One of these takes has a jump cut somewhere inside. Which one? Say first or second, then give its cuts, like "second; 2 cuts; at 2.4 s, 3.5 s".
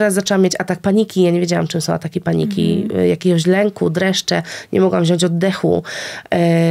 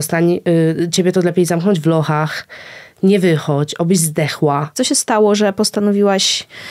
second; 1 cut; at 4.7 s